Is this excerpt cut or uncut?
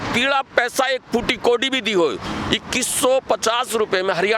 cut